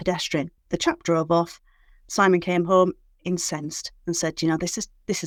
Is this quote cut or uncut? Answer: uncut